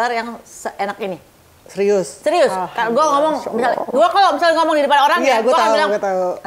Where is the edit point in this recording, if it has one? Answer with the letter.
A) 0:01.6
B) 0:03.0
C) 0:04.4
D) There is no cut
D